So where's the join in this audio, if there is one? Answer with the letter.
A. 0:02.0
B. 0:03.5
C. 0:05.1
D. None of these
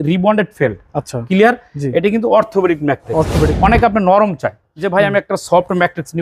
B